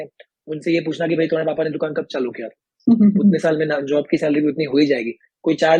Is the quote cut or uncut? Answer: uncut